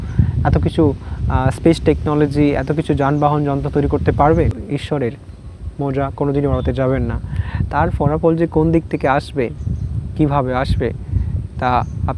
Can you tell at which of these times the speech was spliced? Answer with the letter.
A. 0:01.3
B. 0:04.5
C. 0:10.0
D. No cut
B